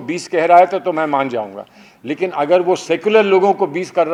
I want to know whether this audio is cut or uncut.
uncut